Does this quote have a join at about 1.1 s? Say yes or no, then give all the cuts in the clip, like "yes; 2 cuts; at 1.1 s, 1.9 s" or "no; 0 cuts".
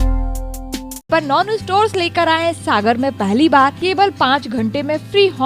yes; 2 cuts; at 1.1 s, 3.8 s